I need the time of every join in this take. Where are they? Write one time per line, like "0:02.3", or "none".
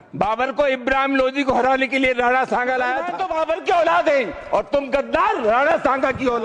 0:03.2